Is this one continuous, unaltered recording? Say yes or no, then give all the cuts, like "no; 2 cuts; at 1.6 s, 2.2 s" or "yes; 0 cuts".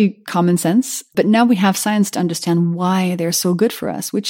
yes; 0 cuts